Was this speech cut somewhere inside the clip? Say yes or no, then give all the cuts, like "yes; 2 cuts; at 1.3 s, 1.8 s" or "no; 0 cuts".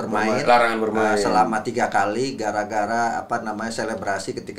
no; 0 cuts